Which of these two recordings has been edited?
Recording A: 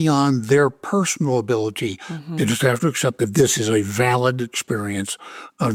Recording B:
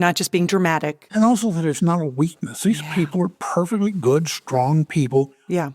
B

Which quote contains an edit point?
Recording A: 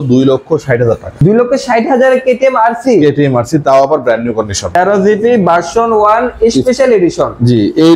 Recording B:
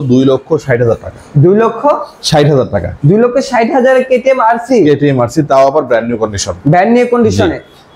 A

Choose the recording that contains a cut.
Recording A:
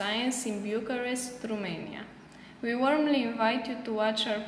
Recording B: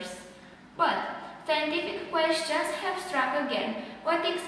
B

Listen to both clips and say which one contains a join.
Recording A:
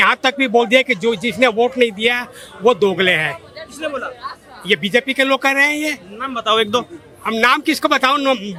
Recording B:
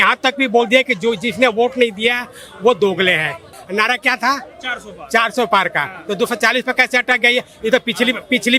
B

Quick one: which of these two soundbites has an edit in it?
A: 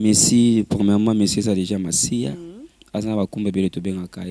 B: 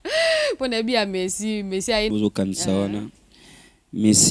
B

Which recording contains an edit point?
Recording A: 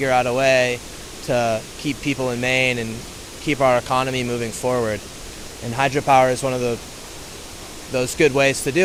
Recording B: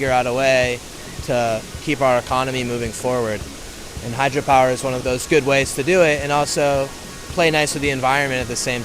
B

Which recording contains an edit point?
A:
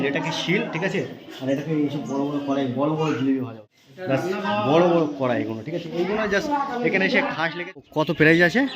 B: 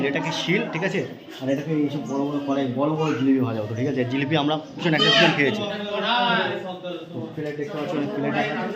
A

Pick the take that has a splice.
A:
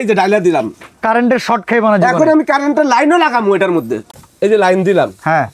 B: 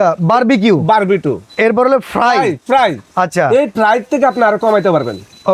A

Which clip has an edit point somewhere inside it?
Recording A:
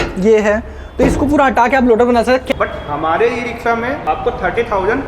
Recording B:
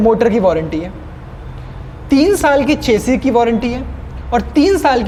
A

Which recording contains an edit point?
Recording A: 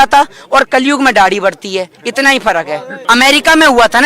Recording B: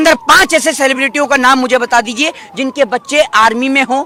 A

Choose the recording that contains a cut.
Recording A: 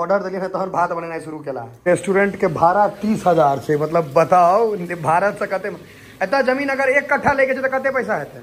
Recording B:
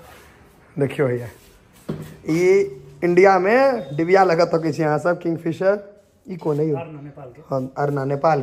A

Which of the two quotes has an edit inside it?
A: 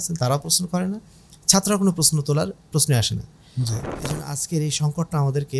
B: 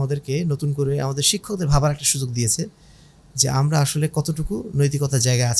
A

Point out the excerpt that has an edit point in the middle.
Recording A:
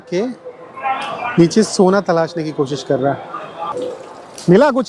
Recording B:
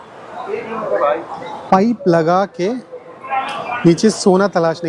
A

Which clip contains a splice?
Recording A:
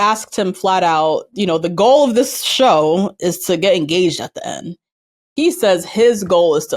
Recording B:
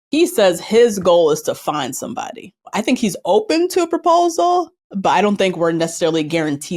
B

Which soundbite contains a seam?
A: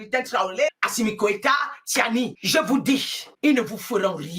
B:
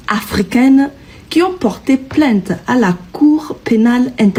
A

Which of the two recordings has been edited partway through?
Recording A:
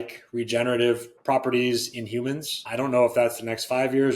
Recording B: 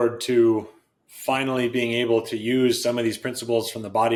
A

